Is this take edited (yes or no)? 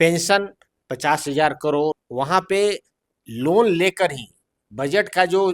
yes